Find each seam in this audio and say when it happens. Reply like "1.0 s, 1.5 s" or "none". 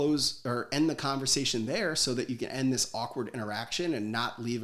none